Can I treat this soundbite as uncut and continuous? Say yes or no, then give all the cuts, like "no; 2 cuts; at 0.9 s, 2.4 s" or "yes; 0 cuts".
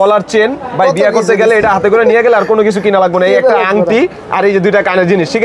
yes; 0 cuts